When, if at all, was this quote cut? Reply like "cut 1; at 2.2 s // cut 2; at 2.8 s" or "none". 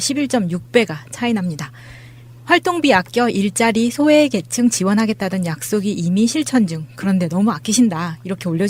none